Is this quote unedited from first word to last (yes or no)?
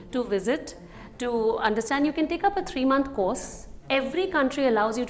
yes